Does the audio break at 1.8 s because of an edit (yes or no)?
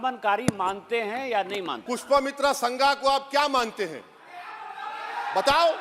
yes